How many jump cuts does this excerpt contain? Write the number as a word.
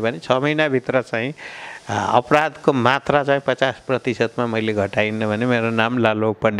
zero